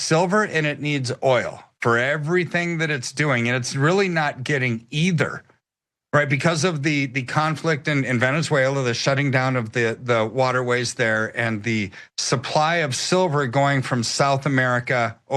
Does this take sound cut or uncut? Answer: uncut